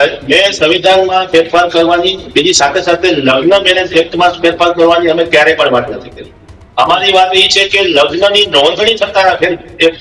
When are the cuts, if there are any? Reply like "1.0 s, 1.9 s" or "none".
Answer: none